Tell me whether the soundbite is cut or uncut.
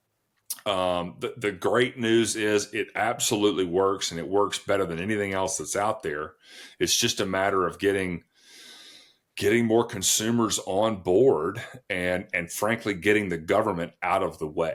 uncut